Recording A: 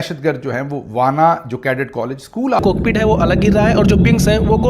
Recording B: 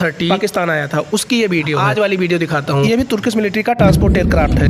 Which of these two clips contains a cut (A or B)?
A